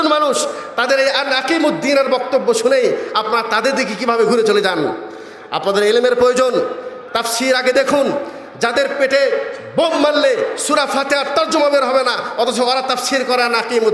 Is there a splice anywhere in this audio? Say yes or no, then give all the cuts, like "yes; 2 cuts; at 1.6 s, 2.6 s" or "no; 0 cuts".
no; 0 cuts